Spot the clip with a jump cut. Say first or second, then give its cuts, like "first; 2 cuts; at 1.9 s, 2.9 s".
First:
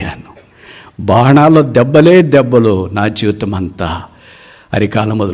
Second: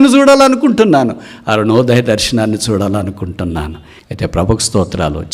second; 1 cut; at 3.8 s